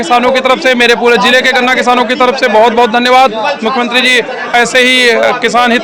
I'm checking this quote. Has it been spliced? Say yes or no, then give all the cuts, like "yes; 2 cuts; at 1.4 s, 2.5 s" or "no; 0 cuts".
no; 0 cuts